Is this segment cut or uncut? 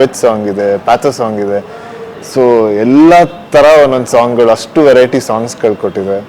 uncut